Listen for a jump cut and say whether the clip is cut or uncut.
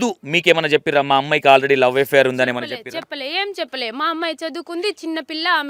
uncut